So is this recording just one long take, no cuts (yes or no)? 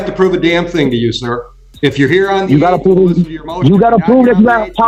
yes